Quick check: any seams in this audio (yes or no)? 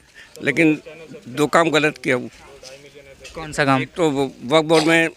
no